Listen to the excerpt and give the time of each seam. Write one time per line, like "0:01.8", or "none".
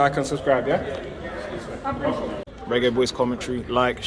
0:02.5